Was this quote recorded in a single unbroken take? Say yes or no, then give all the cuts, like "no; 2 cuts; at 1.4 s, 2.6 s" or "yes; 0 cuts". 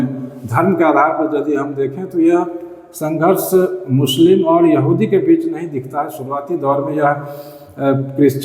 yes; 0 cuts